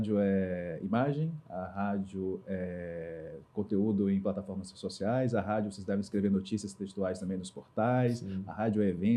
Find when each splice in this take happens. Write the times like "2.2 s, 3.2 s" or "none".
none